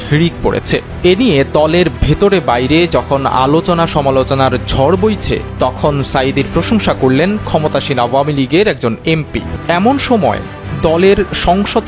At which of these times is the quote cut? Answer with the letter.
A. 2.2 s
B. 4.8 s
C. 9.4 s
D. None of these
C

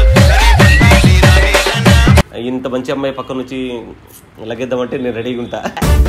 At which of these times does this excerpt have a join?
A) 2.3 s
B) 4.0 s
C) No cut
A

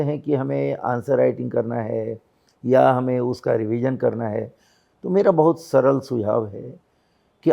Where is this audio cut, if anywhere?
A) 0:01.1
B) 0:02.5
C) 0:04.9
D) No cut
D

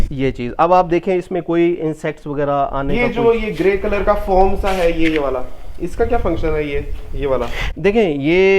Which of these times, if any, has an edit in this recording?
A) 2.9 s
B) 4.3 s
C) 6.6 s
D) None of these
A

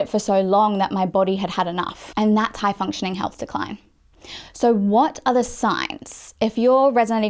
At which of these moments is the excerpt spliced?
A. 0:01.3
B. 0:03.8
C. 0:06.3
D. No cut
D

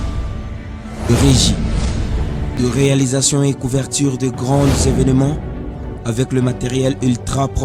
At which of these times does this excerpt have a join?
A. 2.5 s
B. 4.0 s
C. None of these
A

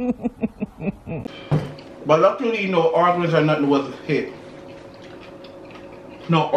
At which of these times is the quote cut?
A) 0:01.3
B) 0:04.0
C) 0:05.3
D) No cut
A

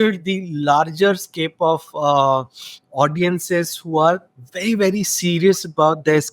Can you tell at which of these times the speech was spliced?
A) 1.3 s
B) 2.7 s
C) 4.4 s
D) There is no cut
D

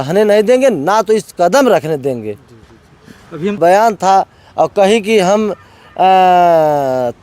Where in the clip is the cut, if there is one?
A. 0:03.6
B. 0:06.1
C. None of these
A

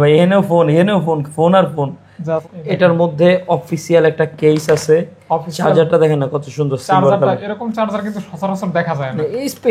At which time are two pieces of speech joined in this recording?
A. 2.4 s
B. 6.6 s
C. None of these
A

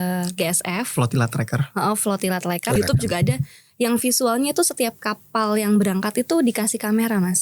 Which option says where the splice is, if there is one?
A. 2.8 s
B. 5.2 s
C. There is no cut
A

